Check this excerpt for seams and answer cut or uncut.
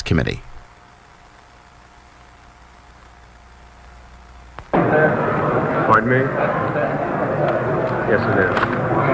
uncut